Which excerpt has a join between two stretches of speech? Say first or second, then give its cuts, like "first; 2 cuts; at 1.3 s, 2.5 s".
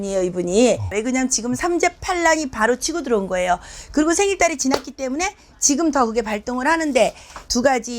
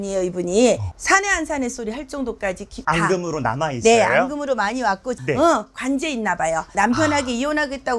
second; 3 cuts; at 0.9 s, 5.2 s, 6.7 s